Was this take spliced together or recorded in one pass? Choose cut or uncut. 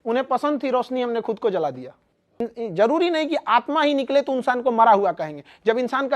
cut